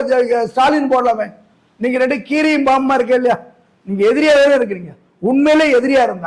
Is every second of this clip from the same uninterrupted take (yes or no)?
yes